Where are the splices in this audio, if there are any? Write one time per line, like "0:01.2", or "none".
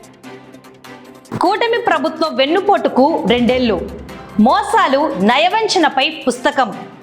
0:01.2